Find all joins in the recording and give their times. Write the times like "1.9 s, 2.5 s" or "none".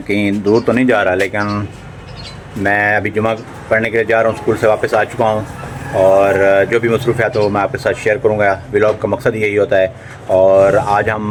none

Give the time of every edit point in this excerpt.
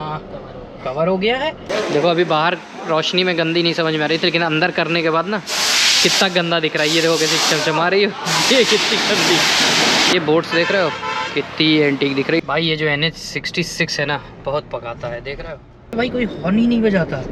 1.6 s, 10.1 s, 12.4 s, 15.9 s

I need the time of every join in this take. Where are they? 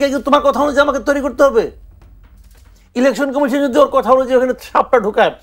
none

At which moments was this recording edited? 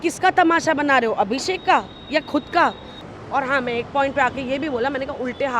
2.9 s

